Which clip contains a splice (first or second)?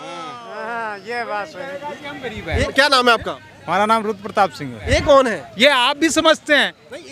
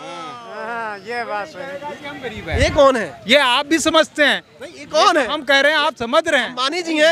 first